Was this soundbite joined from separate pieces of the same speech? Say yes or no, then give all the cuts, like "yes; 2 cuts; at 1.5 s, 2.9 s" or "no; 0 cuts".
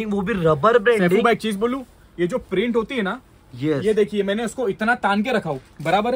no; 0 cuts